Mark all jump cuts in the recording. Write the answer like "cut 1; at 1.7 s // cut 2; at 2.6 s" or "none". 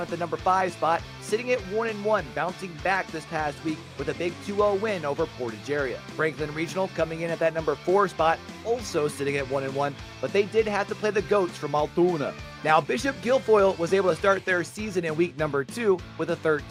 none